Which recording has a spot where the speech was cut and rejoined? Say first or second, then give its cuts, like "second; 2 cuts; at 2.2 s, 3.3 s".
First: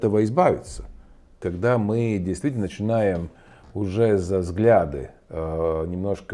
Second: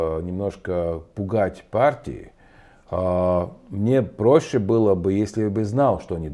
first; 1 cut; at 1.5 s